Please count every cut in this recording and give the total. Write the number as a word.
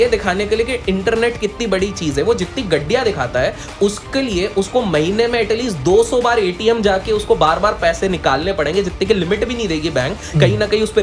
zero